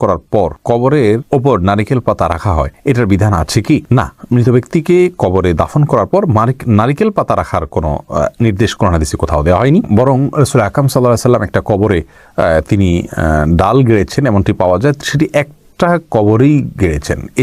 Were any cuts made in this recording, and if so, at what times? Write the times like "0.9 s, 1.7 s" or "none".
none